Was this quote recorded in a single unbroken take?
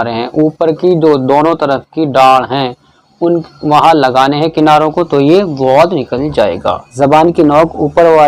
no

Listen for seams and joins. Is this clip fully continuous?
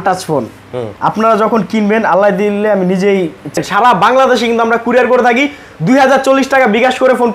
no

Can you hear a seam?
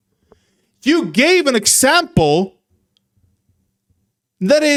no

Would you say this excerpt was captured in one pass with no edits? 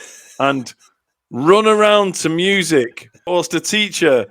no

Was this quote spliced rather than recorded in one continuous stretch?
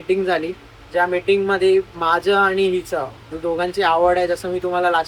no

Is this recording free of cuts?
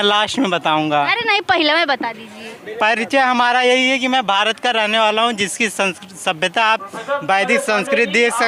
yes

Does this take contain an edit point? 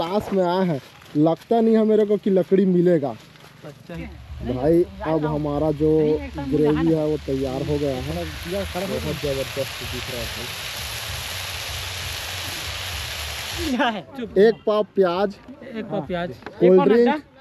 yes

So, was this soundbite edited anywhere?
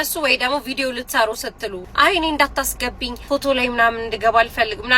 yes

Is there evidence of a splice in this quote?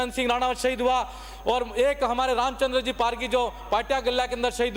no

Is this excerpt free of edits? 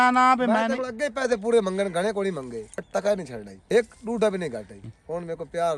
no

